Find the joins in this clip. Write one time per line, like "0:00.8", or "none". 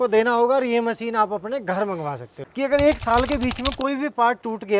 0:02.3